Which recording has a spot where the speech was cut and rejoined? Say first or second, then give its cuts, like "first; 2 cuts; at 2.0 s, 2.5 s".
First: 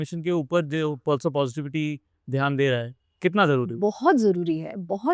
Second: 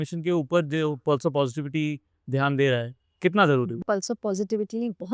second; 1 cut; at 3.8 s